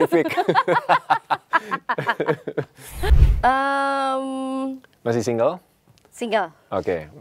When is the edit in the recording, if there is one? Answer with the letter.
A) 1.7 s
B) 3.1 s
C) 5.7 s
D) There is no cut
B